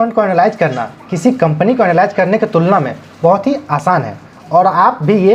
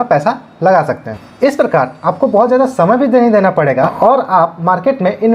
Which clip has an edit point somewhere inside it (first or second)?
second